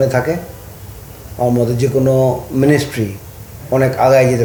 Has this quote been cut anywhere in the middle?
no; 0 cuts

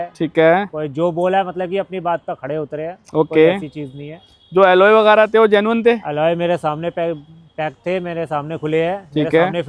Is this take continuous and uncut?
yes; 0 cuts

